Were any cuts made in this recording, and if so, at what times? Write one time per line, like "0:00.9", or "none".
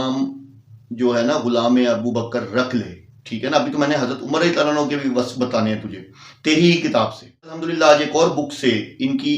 0:07.6